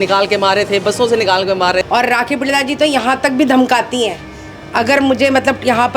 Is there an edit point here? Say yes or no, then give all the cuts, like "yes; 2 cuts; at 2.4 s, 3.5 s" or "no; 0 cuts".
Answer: yes; 1 cut; at 1.9 s